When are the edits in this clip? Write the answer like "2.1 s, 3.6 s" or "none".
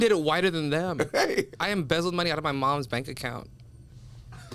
1.5 s